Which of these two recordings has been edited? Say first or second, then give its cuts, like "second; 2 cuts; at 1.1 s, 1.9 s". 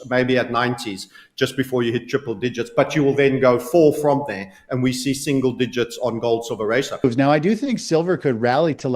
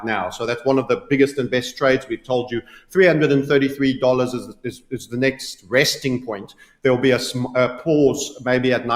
first; 1 cut; at 6.9 s